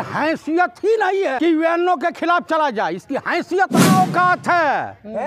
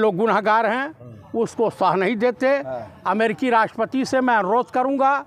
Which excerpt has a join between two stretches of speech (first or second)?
first